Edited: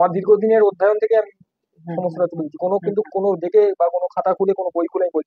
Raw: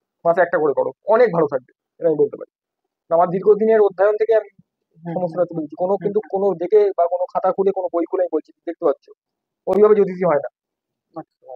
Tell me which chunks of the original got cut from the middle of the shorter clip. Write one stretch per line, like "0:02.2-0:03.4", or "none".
none